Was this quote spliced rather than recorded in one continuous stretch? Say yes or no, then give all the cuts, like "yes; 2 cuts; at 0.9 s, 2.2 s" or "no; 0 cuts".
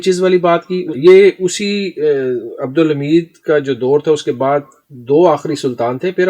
yes; 1 cut; at 0.9 s